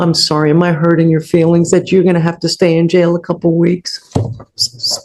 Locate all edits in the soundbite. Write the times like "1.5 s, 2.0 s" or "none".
none